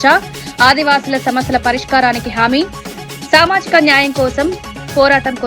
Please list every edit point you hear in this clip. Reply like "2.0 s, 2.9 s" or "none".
none